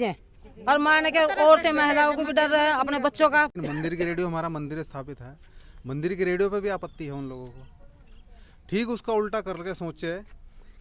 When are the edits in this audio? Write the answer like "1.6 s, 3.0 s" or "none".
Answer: 3.5 s